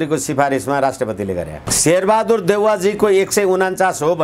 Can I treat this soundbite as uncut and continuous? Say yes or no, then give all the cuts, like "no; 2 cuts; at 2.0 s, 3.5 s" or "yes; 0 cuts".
no; 1 cut; at 1.7 s